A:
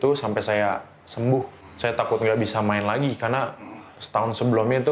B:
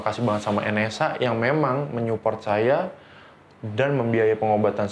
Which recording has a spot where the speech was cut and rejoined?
A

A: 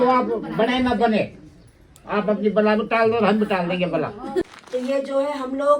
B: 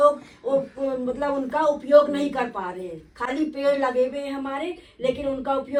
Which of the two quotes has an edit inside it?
A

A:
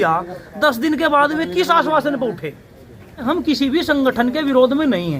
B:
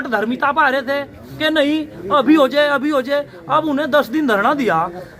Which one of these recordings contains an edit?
A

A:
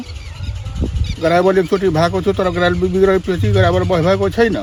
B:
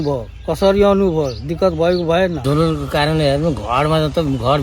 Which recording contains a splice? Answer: B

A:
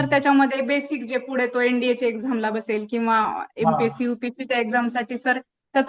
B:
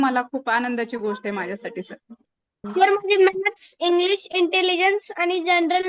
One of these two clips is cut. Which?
B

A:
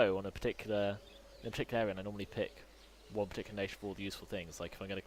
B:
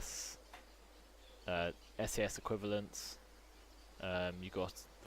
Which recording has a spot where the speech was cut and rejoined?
B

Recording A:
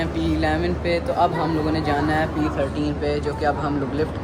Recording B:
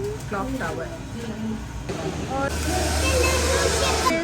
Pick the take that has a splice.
B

